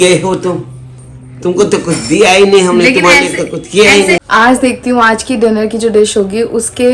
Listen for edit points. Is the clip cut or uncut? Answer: cut